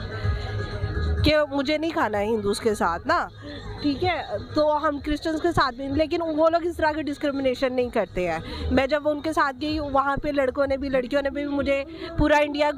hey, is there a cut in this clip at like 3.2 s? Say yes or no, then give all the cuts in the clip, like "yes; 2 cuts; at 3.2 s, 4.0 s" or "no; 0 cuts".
no; 0 cuts